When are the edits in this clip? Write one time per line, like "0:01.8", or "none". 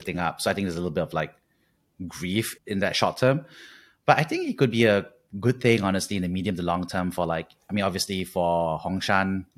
0:02.5